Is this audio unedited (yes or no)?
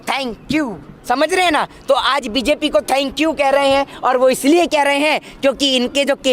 yes